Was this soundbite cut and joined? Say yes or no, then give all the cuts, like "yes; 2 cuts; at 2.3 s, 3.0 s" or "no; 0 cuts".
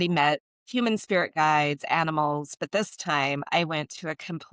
no; 0 cuts